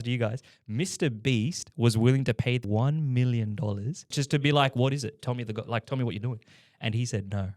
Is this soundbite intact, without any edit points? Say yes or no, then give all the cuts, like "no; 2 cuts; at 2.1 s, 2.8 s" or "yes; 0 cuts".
no; 2 cuts; at 2.6 s, 4.2 s